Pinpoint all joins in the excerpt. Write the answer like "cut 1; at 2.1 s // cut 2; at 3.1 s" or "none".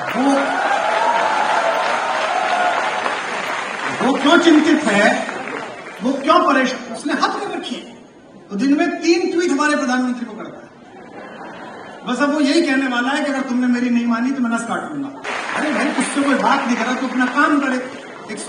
cut 1; at 15.2 s